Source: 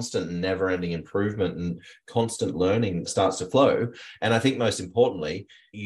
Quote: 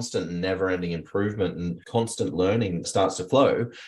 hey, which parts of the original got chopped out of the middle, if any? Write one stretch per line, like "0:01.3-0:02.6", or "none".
0:01.8-0:02.0